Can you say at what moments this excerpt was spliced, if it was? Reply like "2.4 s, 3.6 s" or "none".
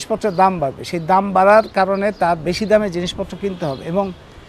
none